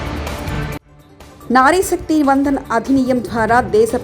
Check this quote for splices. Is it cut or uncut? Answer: cut